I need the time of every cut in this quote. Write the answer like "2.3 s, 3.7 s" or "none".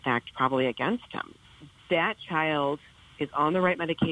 1.4 s